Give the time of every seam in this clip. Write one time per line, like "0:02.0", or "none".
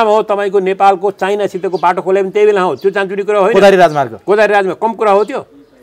none